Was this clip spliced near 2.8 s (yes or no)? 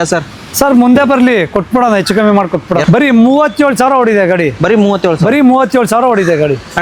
yes